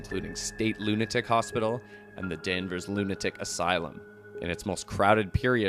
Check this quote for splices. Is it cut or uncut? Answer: cut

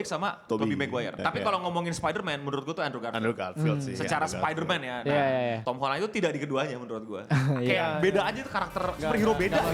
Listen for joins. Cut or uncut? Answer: cut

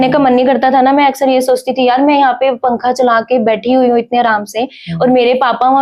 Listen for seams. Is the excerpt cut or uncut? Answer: uncut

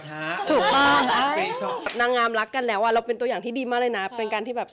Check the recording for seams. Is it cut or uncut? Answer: cut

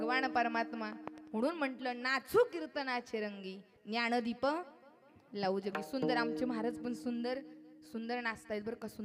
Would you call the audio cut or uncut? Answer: uncut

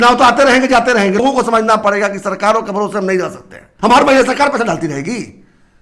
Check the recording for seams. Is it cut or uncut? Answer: cut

